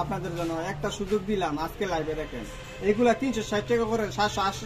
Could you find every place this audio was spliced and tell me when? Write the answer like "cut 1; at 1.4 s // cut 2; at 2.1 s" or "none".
none